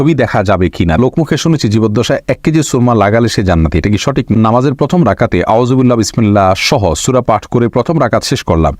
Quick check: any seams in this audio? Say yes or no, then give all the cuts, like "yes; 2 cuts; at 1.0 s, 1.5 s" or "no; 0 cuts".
yes; 2 cuts; at 1.0 s, 4.3 s